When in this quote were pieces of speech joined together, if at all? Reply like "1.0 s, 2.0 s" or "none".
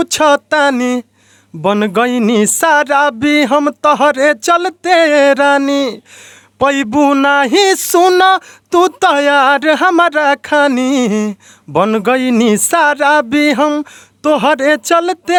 none